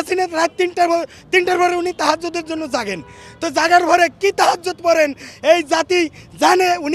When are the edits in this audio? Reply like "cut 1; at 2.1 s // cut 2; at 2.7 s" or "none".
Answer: none